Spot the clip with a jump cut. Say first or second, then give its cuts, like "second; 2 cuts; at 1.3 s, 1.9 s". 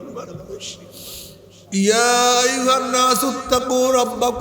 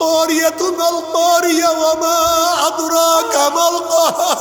first; 1 cut; at 1.5 s